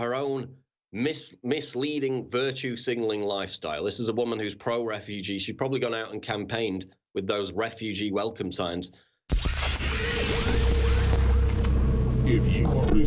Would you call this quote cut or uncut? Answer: cut